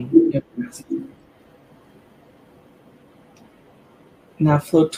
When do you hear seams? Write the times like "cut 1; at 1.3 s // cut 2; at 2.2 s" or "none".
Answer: none